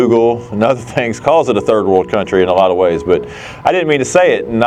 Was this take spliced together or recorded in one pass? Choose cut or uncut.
uncut